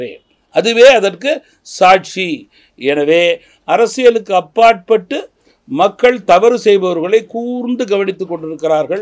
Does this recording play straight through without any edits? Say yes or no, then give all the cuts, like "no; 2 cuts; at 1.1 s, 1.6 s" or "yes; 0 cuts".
yes; 0 cuts